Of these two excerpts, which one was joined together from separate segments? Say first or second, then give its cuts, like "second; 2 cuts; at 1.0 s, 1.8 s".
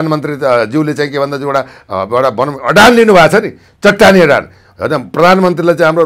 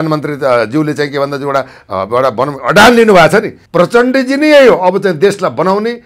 second; 1 cut; at 3.6 s